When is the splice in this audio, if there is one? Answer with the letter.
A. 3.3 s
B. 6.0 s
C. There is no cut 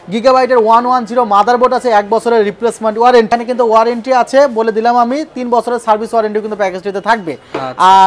A